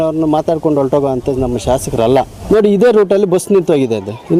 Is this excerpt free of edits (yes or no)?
no